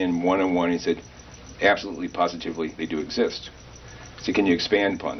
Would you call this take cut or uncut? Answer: uncut